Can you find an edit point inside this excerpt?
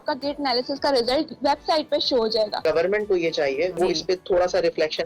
yes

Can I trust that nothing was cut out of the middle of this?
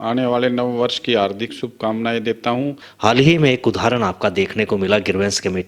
no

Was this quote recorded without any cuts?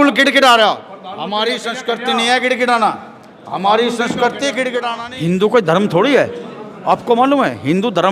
no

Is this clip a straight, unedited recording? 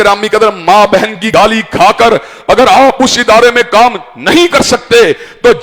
no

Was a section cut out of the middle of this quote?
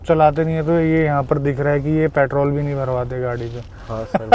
no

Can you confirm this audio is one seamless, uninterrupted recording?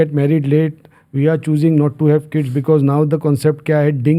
yes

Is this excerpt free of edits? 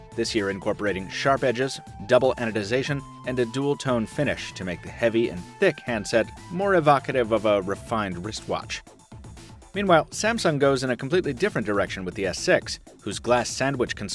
yes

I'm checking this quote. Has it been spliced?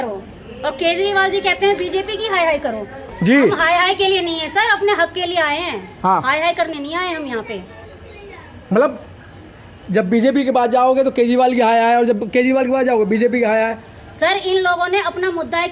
no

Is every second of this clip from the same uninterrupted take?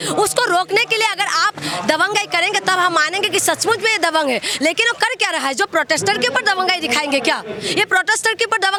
yes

